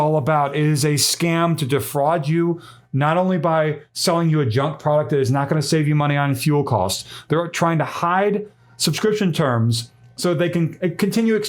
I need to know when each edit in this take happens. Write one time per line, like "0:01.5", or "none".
none